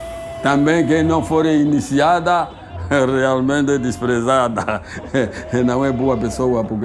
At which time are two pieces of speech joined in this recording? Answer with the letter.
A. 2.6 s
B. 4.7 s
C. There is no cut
C